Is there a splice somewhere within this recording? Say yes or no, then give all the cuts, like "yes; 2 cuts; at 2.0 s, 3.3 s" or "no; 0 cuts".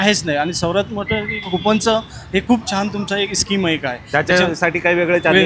no; 0 cuts